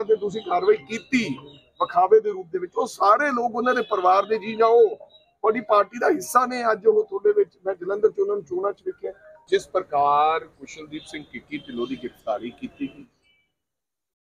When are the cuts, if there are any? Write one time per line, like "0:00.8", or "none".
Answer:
0:09.4